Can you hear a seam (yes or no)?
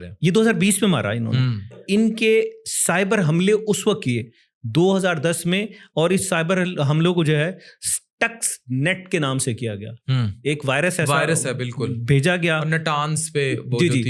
yes